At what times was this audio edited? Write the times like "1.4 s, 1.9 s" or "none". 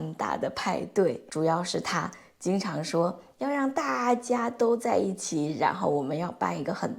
1.2 s